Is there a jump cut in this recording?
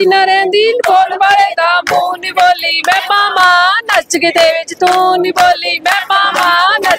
no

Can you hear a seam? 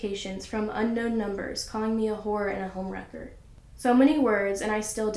no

